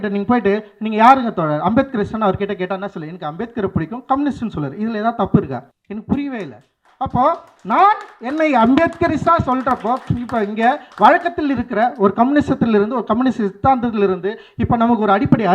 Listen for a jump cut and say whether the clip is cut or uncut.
cut